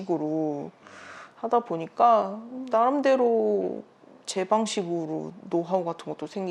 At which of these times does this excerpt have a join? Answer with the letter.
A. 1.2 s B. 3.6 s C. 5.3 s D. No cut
A